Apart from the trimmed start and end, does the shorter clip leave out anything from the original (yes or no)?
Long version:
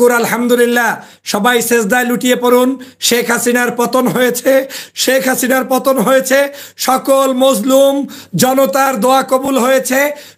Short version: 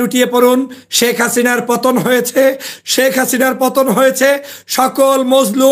no